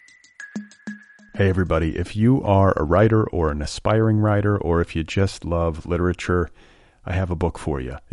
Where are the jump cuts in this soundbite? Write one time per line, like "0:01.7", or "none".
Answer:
0:00.9

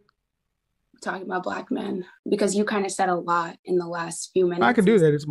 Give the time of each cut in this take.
0:02.1

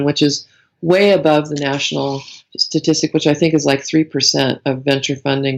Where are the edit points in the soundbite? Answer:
none

